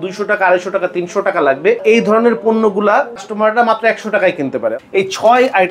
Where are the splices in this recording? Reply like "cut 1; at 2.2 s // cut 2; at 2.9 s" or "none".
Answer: cut 1; at 1.8 s // cut 2; at 3.3 s // cut 3; at 4.8 s